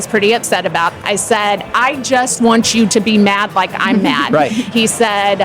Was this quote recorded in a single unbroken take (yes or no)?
no